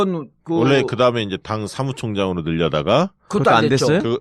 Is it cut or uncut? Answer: uncut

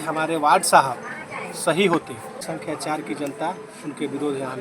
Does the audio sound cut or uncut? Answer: cut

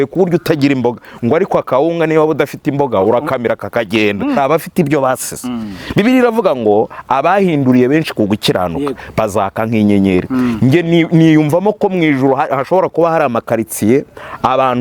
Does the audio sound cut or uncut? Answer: cut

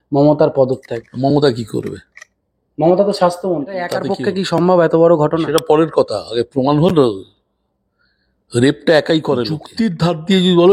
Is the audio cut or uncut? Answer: cut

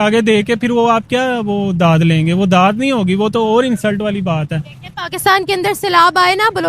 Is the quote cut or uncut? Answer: uncut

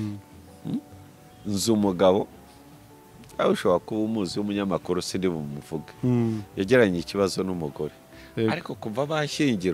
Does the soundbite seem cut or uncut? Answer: cut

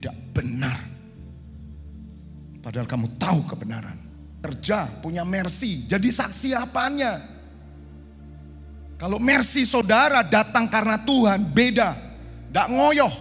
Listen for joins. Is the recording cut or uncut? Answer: cut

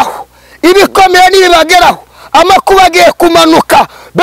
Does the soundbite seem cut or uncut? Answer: uncut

